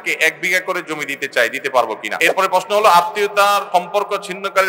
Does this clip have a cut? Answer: yes; 2 cuts; at 2.1 s, 3.7 s

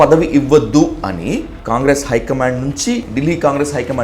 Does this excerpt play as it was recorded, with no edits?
no; 2 cuts; at 1.5 s, 3.1 s

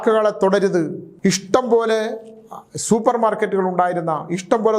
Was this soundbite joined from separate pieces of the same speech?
yes; 1 cut; at 1.0 s

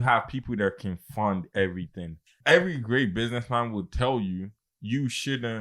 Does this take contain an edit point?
yes; 1 cut; at 2.3 s

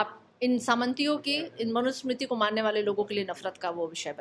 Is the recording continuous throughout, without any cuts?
yes; 0 cuts

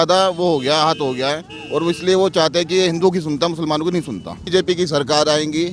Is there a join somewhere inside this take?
yes; 1 cut; at 4.4 s

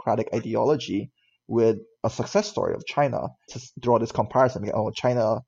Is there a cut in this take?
yes; 1 cut; at 3.5 s

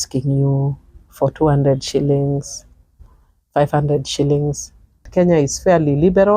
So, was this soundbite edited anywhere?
yes; 1 cut; at 5.1 s

